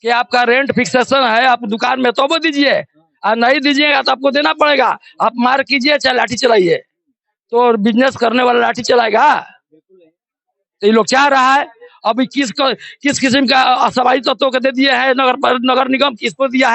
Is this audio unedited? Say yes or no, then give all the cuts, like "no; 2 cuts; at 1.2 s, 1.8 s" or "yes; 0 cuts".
yes; 0 cuts